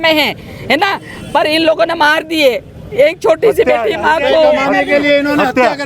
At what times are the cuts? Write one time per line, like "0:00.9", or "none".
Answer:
none

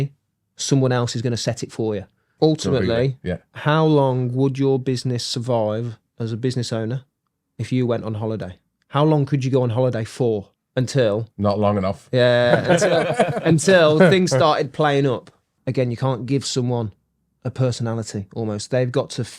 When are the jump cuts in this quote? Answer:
0:02.3
0:10.6
0:15.5

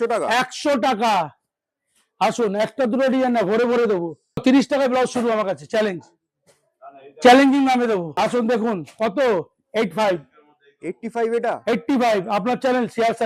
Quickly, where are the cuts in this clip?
0:04.4
0:08.1

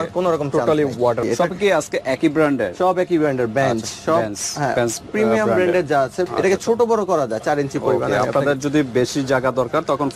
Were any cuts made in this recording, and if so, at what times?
0:01.2
0:06.3

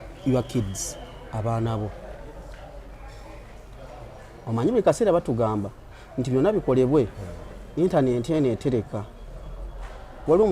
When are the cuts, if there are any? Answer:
none

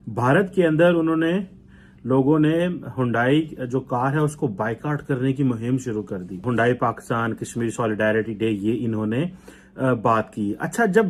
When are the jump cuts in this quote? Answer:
none

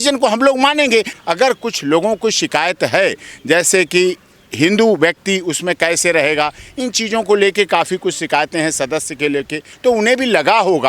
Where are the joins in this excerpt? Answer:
0:01.1
0:09.6

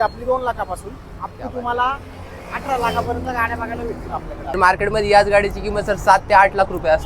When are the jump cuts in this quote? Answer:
0:04.6

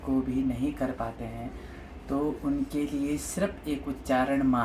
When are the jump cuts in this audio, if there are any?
none

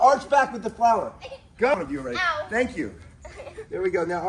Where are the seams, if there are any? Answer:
0:01.7

